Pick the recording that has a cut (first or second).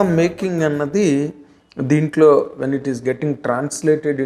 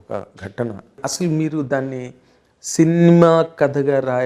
second